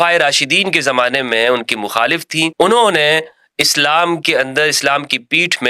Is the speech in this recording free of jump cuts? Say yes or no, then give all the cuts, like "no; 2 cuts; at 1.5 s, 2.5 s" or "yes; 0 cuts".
no; 1 cut; at 2.5 s